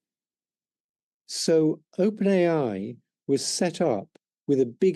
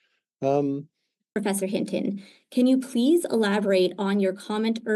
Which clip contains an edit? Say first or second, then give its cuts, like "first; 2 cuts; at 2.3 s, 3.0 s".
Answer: second; 1 cut; at 1.3 s